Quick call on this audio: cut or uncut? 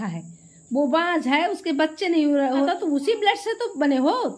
cut